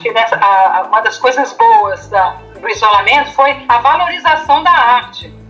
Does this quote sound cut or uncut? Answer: uncut